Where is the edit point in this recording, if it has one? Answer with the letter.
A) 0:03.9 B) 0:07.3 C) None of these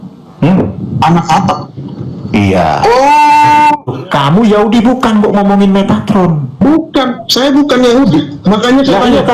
A